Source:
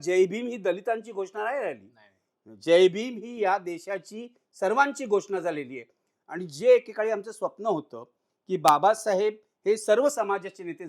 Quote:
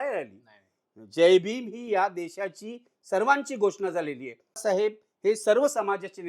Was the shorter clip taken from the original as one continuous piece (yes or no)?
no